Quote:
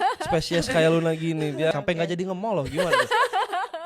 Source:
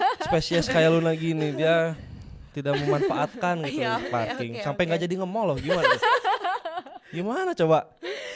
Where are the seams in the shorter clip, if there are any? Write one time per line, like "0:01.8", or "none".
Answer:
0:01.7